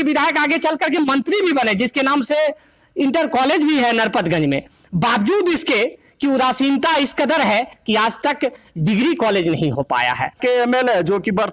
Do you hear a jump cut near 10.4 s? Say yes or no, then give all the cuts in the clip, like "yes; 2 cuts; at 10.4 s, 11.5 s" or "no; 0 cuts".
yes; 1 cut; at 10.4 s